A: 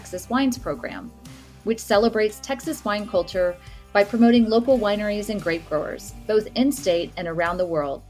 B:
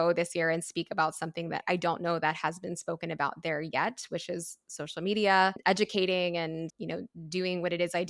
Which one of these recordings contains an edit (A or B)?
B